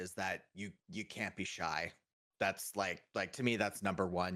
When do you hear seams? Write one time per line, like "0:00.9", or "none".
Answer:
none